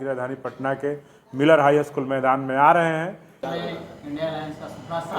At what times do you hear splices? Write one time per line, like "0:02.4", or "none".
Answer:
0:03.4